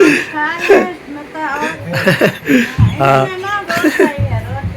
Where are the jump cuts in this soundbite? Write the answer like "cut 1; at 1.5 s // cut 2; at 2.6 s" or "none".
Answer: cut 1; at 1.7 s

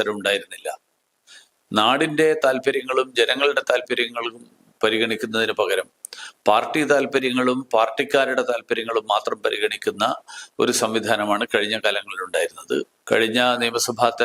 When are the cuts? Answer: cut 1; at 13.0 s

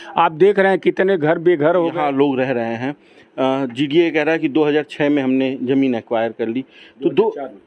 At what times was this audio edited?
cut 1; at 1.9 s

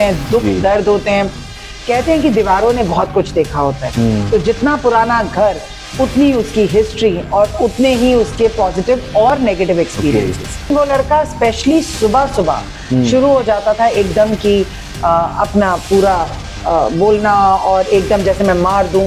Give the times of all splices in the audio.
cut 1; at 10.7 s

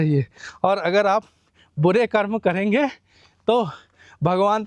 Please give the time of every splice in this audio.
none

